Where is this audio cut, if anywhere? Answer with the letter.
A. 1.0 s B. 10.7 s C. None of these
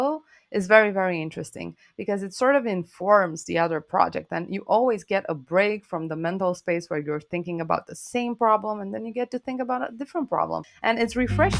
B